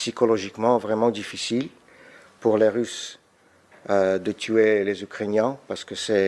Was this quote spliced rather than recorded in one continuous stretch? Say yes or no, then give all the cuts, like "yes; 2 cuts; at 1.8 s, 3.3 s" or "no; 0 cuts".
no; 0 cuts